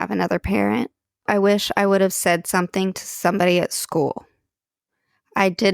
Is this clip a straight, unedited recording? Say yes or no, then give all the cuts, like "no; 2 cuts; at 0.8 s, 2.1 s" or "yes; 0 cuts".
no; 1 cut; at 1.3 s